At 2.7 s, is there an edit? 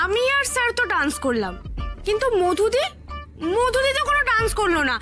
no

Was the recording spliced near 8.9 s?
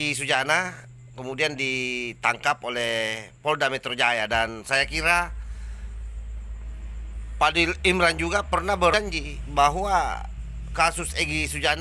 yes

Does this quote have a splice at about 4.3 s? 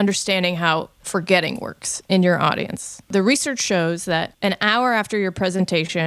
yes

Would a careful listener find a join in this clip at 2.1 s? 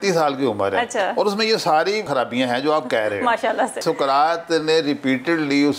yes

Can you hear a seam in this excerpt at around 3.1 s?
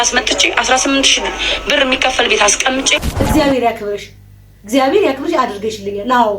yes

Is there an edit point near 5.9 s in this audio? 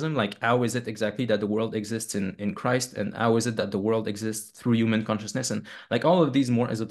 no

